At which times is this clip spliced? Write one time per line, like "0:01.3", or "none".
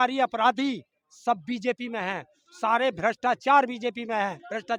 none